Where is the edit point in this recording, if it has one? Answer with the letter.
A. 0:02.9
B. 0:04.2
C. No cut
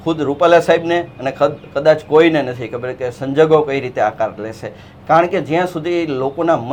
C